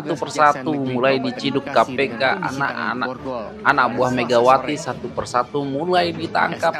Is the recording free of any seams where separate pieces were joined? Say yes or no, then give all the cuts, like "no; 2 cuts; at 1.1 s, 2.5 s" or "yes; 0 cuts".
yes; 0 cuts